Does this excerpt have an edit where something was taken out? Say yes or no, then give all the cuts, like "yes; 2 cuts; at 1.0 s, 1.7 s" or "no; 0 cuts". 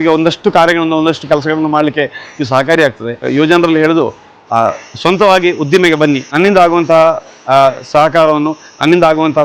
yes; 2 cuts; at 3.3 s, 6.3 s